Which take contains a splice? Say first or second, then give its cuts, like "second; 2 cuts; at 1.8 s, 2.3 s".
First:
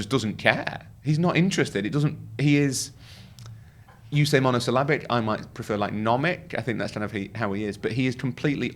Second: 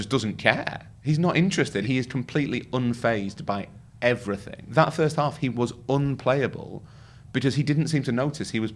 second; 2 cuts; at 1.8 s, 4.5 s